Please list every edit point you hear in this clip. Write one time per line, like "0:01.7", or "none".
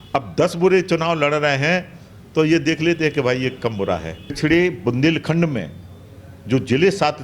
0:04.4